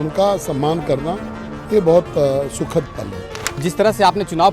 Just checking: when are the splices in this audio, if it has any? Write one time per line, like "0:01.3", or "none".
0:03.6